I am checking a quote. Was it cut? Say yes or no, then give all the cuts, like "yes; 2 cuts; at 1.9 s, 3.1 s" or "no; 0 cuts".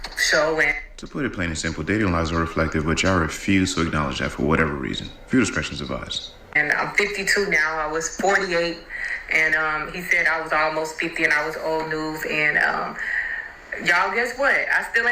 no; 0 cuts